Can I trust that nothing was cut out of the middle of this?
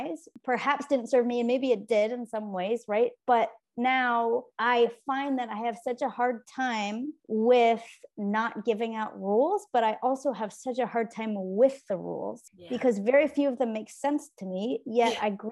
yes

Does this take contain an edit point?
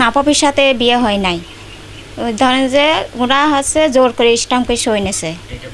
no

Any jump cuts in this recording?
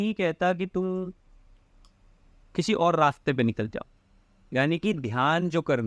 no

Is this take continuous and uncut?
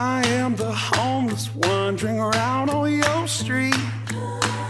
yes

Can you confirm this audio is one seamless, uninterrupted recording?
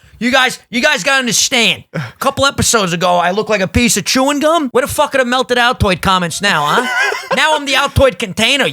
no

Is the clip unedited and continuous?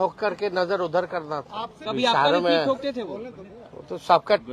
no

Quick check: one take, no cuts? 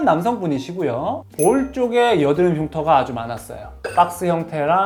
yes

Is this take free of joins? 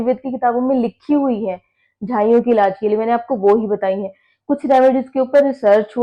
yes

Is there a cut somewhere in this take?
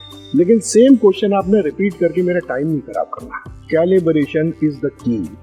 yes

